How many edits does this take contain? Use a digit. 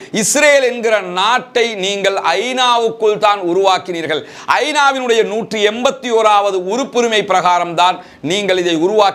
0